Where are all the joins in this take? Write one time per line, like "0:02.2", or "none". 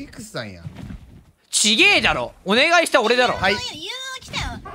none

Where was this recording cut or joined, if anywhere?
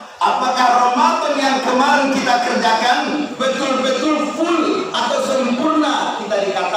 none

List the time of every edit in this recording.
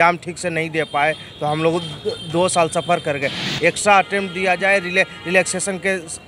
0:03.5

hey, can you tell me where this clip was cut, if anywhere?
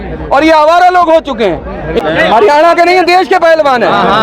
0:02.0

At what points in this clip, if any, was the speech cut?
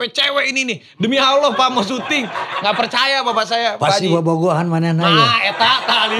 none

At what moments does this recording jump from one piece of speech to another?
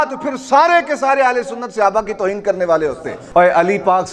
0:03.1

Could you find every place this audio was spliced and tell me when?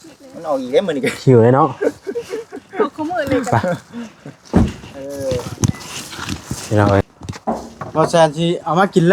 0:07.1

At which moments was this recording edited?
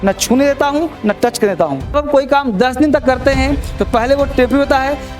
0:01.9

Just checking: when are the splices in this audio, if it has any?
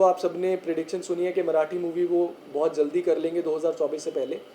none

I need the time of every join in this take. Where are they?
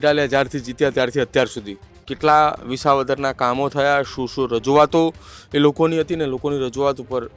none

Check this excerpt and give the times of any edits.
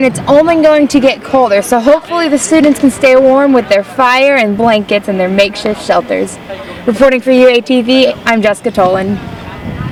none

